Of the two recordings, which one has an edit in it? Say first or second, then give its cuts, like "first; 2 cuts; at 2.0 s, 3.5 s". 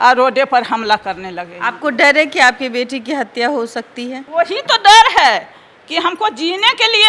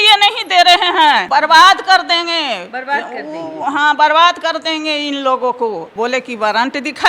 second; 2 cuts; at 1.2 s, 5.9 s